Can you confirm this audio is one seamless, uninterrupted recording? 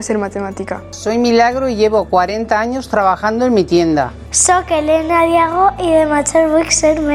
yes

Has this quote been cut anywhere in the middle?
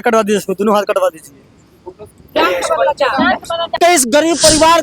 yes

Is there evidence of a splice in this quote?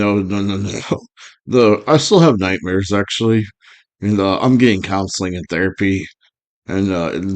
no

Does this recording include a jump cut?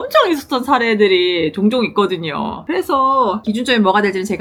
no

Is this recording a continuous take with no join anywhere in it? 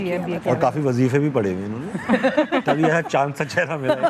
yes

